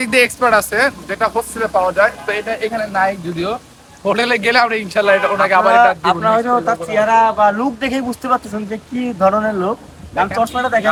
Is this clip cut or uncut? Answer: uncut